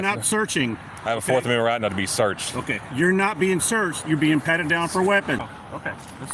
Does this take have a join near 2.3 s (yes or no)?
no